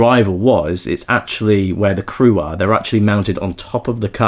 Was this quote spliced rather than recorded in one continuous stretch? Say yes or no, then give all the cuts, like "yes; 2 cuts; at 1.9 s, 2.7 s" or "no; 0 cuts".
no; 0 cuts